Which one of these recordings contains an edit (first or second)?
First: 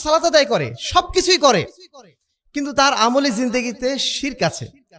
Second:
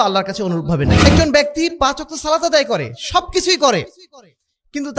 second